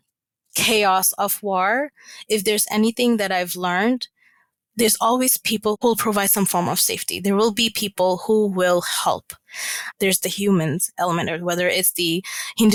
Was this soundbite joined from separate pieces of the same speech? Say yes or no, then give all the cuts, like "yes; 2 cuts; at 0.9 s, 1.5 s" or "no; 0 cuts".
no; 0 cuts